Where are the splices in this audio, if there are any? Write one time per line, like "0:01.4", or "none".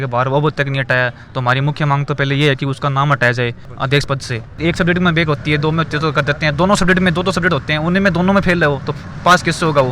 0:04.6